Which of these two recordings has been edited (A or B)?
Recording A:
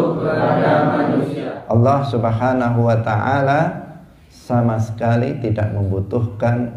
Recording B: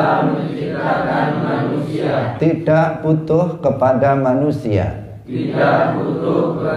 A